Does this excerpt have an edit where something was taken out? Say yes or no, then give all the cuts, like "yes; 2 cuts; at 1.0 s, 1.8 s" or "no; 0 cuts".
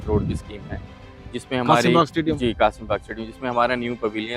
no; 0 cuts